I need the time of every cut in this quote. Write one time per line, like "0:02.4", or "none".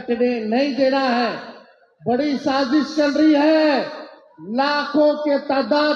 none